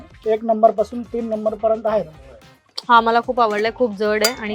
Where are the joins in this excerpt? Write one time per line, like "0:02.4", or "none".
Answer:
none